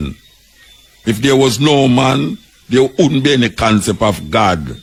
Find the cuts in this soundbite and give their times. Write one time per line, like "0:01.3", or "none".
none

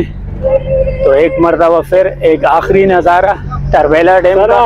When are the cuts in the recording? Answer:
none

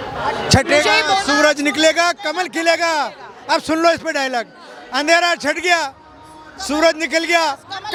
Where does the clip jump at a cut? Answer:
none

